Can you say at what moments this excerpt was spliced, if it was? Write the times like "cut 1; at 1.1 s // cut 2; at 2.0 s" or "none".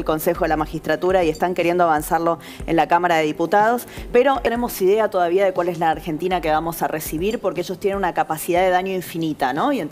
cut 1; at 4.4 s

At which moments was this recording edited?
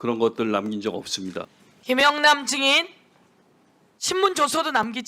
cut 1; at 1.5 s

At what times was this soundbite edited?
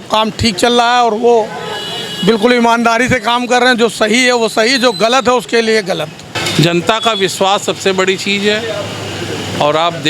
cut 1; at 6.3 s

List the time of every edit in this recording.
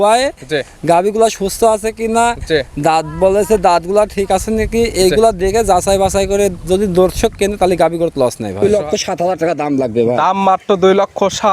cut 1; at 8.6 s

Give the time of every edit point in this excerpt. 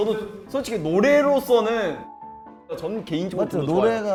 none

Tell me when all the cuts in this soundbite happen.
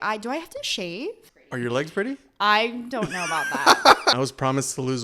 cut 1; at 1.3 s // cut 2; at 4.1 s

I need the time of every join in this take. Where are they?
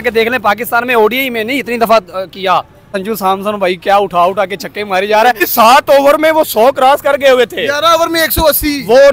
cut 1; at 2.9 s // cut 2; at 5.4 s

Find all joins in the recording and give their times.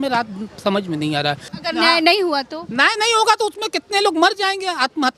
cut 1; at 1.5 s

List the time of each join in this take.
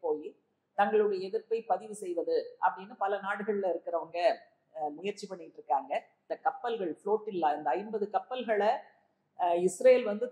cut 1; at 6.2 s

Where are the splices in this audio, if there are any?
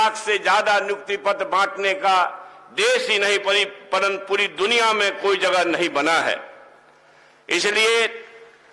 none

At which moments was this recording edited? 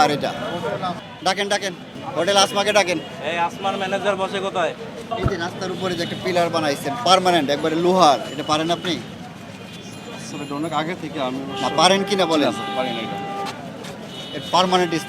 cut 1; at 1.0 s // cut 2; at 1.9 s // cut 3; at 5.1 s

